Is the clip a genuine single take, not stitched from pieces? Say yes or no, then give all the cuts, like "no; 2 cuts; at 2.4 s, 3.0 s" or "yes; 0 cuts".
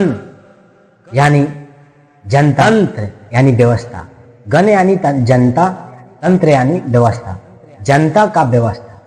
no; 1 cut; at 2.6 s